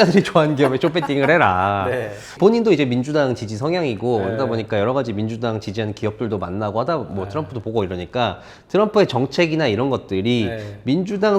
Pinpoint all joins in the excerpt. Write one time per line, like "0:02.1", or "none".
0:02.3